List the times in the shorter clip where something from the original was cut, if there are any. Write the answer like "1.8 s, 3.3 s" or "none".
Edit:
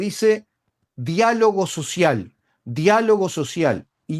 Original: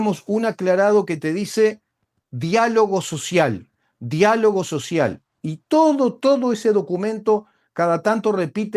none